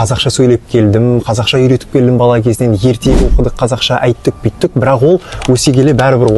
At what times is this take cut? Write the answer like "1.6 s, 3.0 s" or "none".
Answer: none